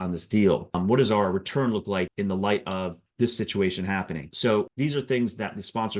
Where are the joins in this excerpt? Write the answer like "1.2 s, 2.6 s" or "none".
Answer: 2.1 s, 3.0 s, 4.6 s